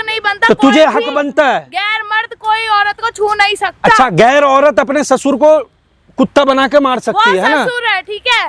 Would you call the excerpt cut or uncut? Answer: uncut